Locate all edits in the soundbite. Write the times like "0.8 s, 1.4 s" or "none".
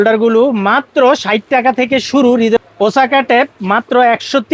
2.6 s